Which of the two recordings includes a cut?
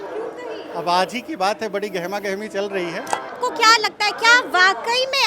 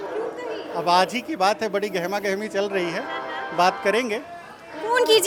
first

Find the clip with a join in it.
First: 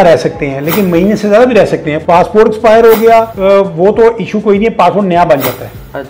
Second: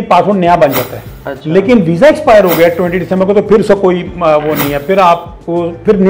first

